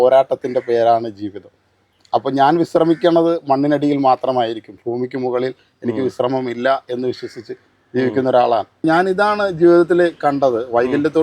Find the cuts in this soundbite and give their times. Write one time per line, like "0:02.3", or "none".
0:08.8

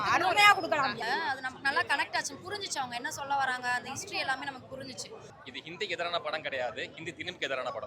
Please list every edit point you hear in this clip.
0:01.0
0:05.3

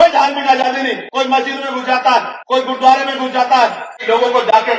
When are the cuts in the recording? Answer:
0:01.0
0:02.4
0:03.9

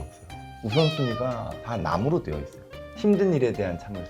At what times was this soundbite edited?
0:01.5
0:02.8

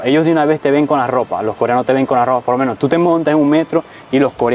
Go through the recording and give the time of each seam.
none

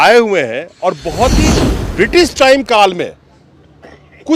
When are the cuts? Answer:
0:01.6

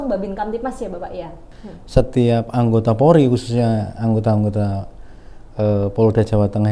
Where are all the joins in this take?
0:01.4

